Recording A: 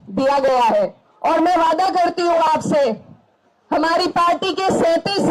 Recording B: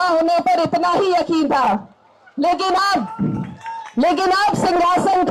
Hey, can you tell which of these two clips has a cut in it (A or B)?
A